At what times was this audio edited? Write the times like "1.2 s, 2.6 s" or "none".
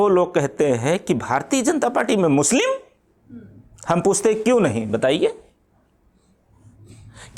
none